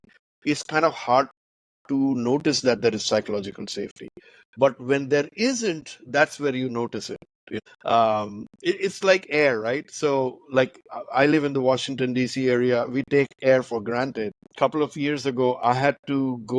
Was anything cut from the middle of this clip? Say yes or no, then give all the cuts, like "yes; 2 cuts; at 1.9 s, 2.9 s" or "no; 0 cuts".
yes; 2 cuts; at 7.5 s, 14.4 s